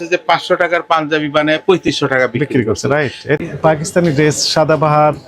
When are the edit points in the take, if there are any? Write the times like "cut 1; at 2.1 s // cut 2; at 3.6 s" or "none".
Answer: cut 1; at 3.4 s